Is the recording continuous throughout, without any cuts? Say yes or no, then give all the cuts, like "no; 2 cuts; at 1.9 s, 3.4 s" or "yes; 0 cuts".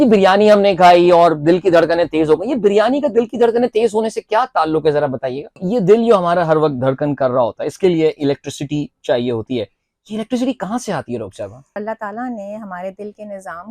no; 2 cuts; at 5.6 s, 11.8 s